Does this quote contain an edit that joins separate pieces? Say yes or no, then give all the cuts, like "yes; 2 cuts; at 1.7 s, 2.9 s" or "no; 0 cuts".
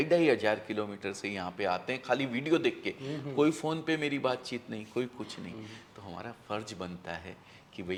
no; 0 cuts